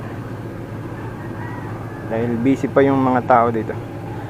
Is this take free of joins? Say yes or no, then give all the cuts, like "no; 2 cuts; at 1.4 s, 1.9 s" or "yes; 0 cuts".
yes; 0 cuts